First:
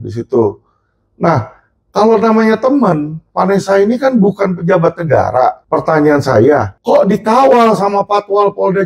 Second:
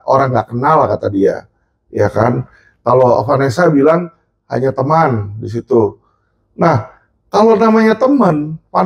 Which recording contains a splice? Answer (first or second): first